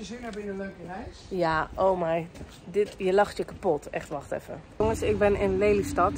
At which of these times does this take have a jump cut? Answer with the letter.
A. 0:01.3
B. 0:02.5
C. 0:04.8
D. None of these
C